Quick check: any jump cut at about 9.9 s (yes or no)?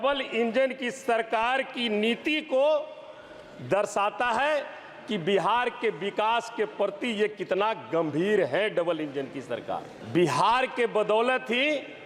yes